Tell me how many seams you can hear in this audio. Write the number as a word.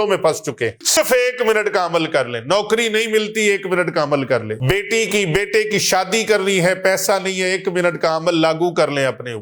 two